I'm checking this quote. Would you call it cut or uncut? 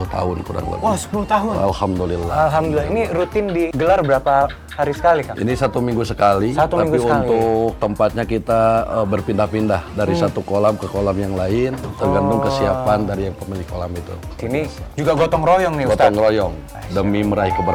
cut